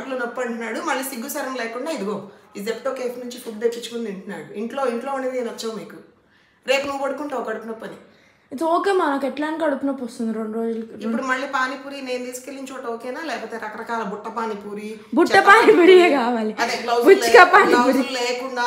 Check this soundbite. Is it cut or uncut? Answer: uncut